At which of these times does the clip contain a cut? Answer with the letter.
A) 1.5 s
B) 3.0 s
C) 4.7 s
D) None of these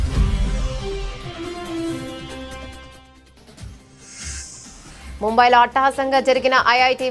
C